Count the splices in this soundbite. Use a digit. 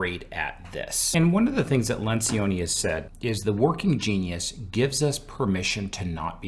2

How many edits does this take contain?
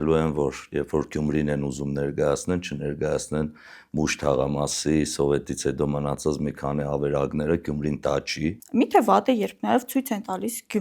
1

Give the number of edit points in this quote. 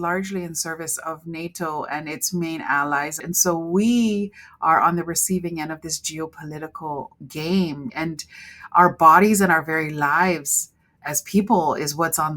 3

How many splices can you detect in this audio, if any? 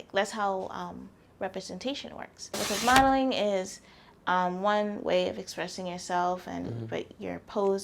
1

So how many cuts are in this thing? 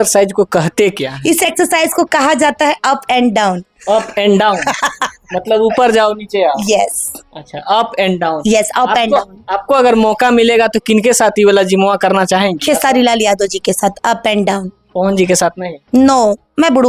0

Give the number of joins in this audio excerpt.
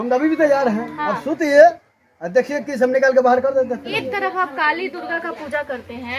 1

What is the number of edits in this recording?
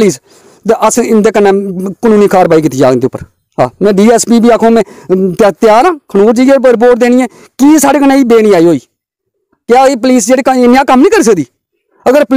0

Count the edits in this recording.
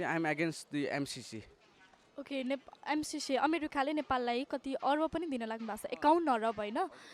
0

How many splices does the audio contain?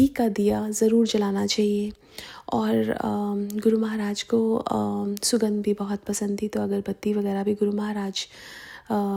0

